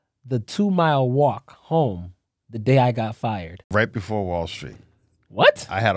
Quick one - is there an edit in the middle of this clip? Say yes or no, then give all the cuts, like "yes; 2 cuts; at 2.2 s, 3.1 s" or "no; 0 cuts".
yes; 1 cut; at 3.7 s